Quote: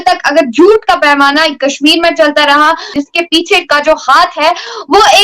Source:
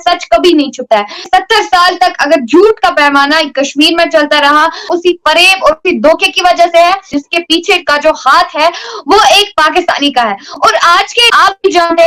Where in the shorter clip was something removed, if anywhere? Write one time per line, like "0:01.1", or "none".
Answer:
0:02.9